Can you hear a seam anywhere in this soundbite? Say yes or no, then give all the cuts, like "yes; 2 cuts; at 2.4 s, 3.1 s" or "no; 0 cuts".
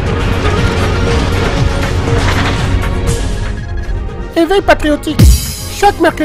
no; 0 cuts